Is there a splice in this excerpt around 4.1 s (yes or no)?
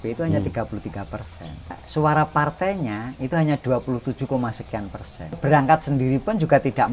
no